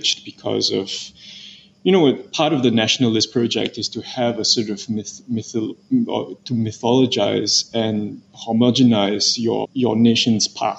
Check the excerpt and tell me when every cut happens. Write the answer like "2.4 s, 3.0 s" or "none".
9.7 s